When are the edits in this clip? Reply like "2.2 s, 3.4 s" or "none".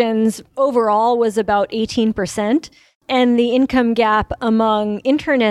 2.9 s